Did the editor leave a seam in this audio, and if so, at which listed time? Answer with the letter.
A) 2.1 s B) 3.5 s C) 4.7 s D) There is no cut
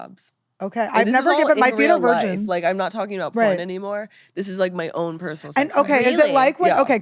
D